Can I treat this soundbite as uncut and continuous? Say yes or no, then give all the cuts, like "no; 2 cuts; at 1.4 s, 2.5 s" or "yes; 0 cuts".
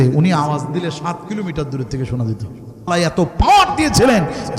no; 1 cut; at 2.9 s